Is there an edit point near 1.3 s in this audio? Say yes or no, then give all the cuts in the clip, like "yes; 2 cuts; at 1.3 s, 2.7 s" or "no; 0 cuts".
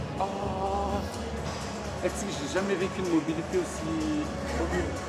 no; 0 cuts